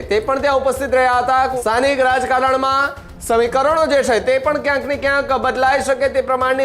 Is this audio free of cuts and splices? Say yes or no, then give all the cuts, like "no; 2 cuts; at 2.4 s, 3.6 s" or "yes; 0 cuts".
no; 1 cut; at 1.6 s